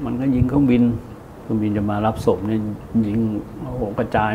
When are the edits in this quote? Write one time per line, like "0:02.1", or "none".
0:01.1